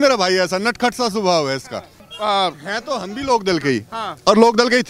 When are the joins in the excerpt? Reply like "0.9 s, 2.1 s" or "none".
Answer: 2.0 s